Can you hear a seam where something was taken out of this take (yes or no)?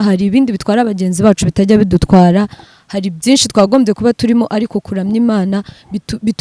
no